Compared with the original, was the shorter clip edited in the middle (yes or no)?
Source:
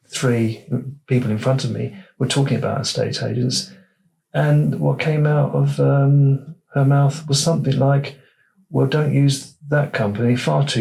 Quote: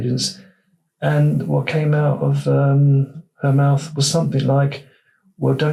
no